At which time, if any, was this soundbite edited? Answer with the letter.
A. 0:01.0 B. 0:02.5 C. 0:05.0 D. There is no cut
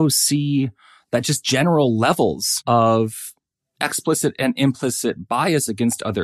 B